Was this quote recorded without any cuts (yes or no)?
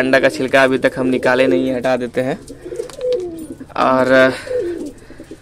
yes